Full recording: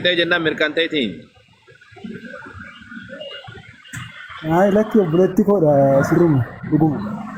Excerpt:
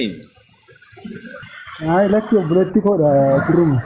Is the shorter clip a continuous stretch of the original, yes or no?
no